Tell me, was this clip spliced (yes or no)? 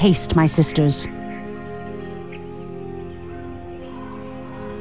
yes